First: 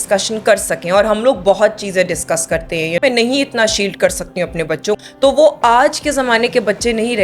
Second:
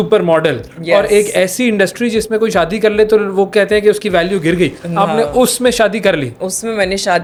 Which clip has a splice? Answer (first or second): first